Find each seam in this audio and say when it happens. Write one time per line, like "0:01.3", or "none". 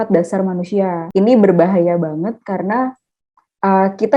0:01.0